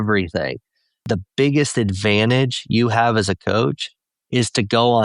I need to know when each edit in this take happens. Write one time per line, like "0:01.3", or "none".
0:01.1